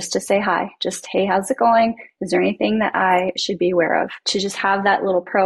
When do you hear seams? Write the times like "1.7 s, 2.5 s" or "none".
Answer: 4.2 s